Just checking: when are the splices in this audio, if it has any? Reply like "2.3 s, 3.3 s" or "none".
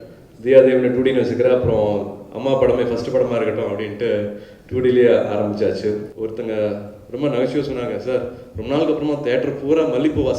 6.1 s